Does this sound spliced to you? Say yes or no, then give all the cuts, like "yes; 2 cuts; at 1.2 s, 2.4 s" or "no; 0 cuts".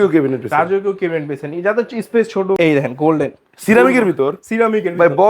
yes; 1 cut; at 2.6 s